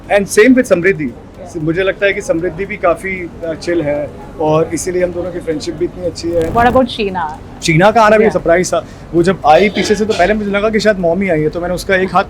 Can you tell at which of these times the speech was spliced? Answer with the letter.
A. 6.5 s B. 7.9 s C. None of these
A